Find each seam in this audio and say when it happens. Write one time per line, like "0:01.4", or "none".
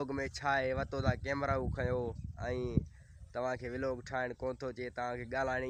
none